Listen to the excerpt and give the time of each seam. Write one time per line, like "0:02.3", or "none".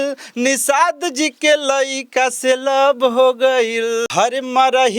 0:04.1